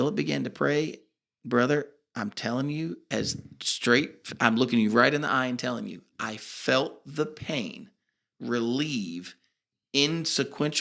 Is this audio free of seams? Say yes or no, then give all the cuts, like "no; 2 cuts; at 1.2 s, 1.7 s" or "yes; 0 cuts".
yes; 0 cuts